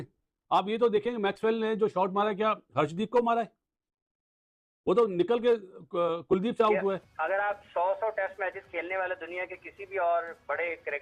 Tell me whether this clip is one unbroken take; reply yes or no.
no